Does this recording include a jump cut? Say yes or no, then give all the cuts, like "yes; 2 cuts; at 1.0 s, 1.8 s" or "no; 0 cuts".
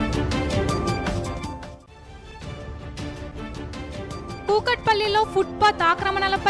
no; 0 cuts